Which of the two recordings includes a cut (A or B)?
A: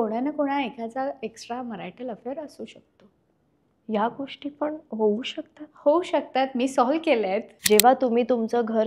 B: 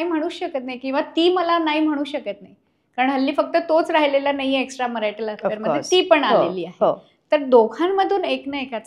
A